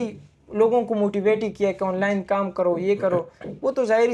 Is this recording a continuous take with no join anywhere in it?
yes; 0 cuts

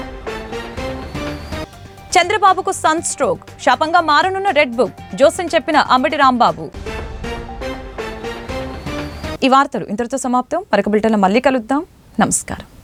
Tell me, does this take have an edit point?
no; 0 cuts

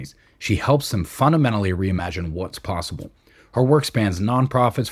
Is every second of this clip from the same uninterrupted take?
yes; 0 cuts

